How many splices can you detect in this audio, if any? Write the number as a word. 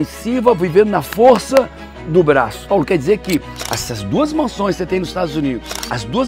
one